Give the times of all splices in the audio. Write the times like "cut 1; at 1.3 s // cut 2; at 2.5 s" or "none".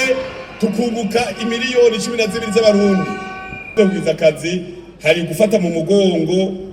cut 1; at 3.6 s